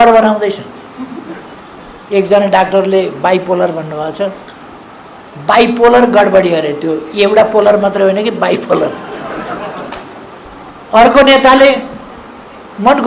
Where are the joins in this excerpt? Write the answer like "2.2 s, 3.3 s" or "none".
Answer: 10.5 s